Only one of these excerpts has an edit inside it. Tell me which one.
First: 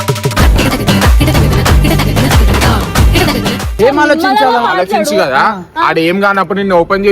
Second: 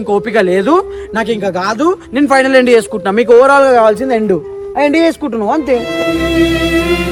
first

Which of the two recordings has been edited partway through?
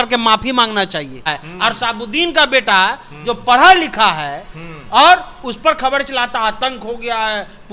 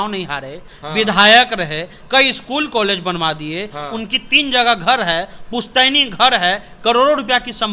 first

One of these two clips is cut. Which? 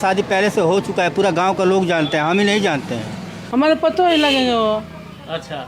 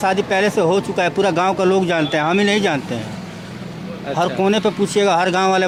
first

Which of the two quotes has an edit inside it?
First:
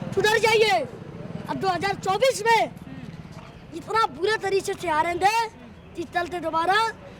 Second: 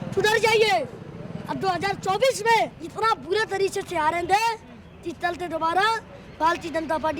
second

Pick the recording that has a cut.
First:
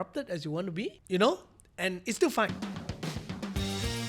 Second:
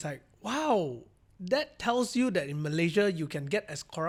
first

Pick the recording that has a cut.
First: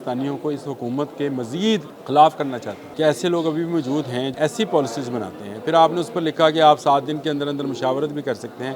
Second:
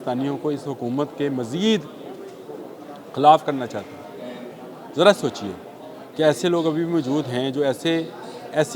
first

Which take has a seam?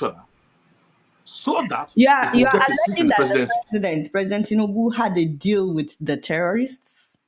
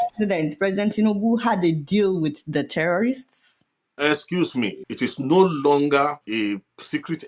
second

